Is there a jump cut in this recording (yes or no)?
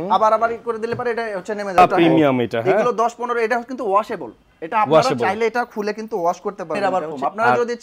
yes